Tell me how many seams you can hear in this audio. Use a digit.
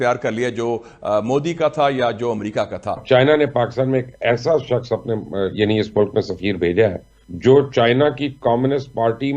1